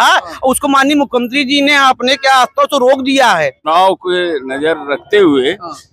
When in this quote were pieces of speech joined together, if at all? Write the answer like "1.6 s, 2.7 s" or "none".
3.7 s